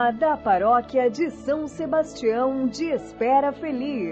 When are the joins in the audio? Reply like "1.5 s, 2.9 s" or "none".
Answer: none